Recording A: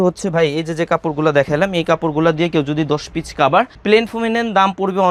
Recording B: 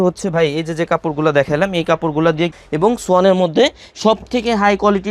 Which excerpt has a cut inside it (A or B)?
B